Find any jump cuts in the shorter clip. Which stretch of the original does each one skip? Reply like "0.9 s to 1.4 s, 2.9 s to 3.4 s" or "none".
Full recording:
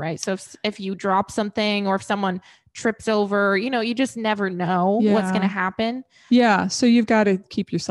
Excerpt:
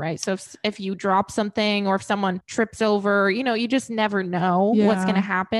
2.4 s to 2.7 s